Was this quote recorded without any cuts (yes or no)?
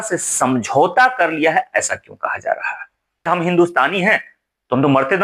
no